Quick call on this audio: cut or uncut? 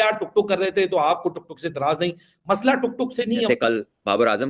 cut